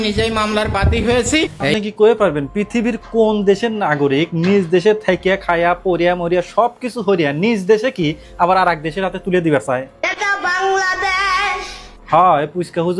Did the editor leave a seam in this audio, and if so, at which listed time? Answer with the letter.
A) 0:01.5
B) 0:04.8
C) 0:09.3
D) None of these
A